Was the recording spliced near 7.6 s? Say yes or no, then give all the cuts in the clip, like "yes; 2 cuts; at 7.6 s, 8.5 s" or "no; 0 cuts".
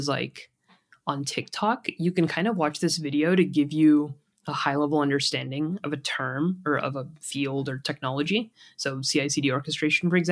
no; 0 cuts